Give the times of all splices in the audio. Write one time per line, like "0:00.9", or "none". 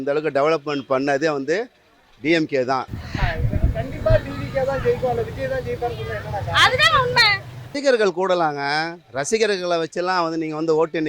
0:03.0
0:07.7